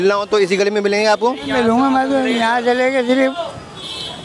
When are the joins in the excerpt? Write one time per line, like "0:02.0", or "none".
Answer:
none